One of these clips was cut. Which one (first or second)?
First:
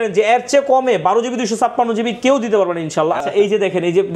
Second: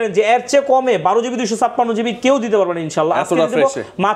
first